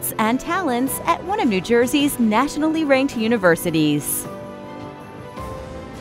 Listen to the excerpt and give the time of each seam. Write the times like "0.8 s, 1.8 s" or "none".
4.1 s